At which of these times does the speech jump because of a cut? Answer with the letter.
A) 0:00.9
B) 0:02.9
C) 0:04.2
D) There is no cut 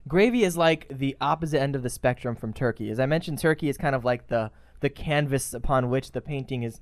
A